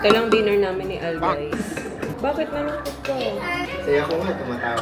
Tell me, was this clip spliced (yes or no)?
yes